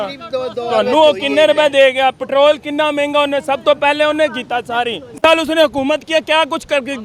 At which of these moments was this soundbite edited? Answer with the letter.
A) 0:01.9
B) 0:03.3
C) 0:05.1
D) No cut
C